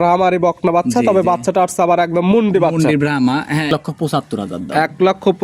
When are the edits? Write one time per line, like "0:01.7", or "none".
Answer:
0:03.7